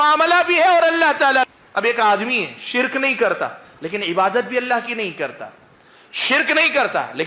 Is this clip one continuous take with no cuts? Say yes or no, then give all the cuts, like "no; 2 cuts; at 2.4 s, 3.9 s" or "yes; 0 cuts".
no; 1 cut; at 1.6 s